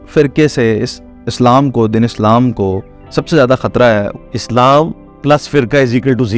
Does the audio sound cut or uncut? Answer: cut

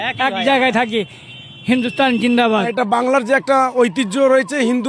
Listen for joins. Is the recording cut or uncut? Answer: cut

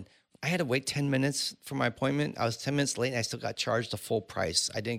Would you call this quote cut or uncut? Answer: uncut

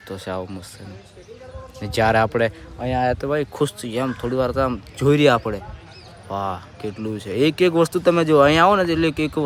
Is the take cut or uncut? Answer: uncut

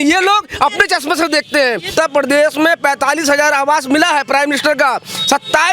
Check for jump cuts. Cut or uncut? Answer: cut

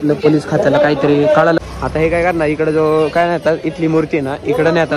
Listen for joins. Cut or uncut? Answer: cut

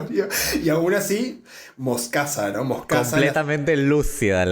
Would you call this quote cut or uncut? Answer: cut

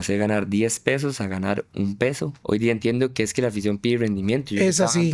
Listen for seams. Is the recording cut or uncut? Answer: cut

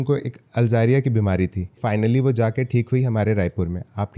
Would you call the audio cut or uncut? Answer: cut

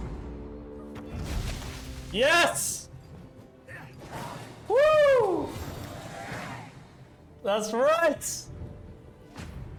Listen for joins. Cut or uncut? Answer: uncut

